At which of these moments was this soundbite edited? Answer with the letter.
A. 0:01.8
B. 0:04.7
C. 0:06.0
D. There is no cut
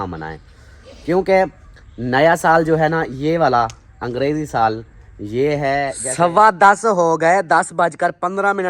C